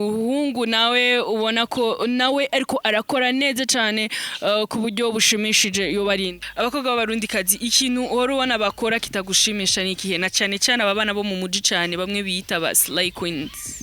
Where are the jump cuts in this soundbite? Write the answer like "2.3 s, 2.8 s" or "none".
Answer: 6.4 s